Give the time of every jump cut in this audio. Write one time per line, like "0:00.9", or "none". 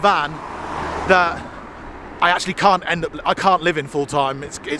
none

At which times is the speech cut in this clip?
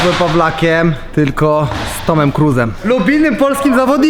0:01.0
0:02.8

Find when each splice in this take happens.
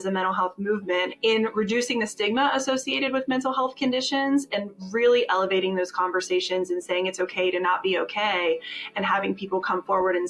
0:01.1

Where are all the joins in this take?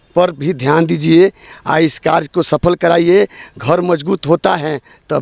none

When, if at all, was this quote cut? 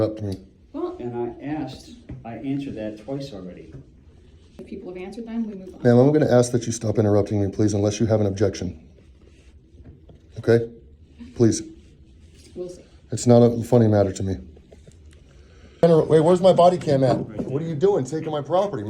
0:04.6
0:15.8

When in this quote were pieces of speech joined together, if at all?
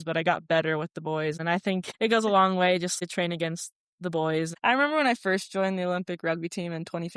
0:01.8
0:03.0
0:04.6

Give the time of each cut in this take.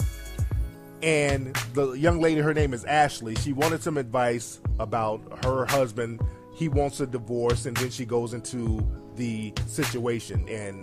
none

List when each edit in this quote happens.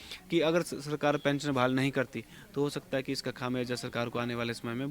none

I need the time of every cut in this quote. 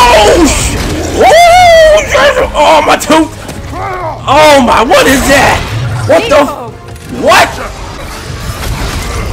0:08.0

